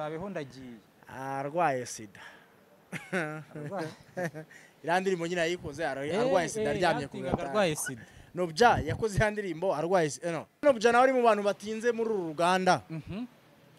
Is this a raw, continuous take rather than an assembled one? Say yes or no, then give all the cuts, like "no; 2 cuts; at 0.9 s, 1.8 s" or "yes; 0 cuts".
no; 1 cut; at 10.6 s